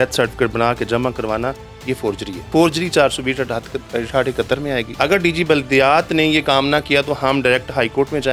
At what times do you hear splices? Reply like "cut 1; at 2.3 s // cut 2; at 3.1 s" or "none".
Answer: cut 1; at 2.3 s // cut 2; at 4.9 s

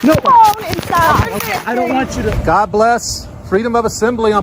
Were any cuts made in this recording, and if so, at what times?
cut 1; at 2.4 s

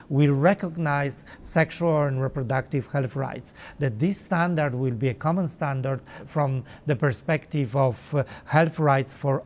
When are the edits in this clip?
none

